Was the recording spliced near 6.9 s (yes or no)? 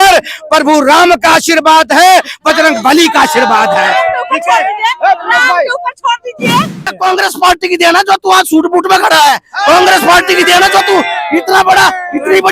yes